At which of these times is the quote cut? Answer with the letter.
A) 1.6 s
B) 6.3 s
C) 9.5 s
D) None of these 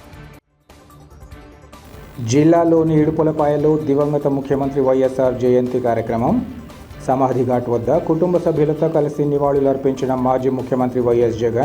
A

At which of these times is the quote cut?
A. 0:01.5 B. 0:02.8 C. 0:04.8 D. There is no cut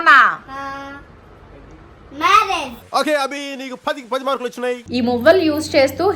C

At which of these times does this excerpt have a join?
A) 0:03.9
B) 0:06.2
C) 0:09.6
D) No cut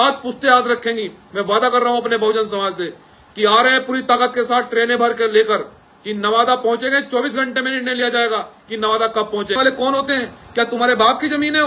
C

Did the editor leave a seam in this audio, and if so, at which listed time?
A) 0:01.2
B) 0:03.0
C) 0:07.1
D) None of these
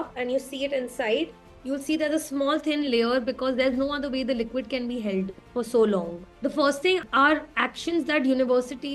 C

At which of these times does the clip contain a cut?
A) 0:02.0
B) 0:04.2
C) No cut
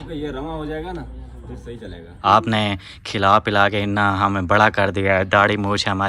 A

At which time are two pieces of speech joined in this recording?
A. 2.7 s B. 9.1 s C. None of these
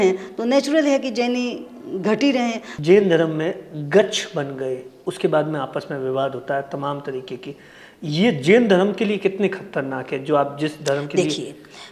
A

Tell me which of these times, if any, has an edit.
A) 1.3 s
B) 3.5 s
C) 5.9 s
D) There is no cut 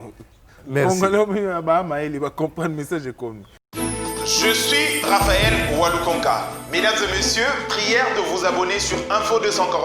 B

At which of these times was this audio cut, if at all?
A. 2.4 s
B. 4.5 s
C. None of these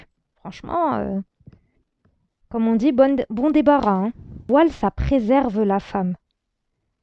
B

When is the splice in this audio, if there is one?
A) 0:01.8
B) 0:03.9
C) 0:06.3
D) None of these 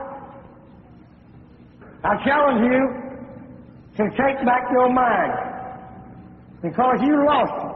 A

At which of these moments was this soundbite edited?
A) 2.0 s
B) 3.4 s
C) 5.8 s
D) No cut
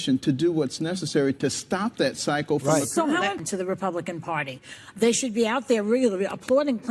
B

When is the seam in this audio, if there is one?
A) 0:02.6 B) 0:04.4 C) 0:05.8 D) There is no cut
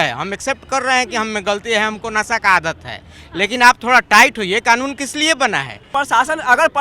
C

